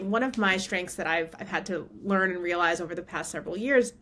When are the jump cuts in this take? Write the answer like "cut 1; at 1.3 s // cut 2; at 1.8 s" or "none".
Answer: none